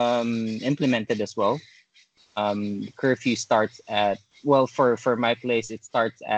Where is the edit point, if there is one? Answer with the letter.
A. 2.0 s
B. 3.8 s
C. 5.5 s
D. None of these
D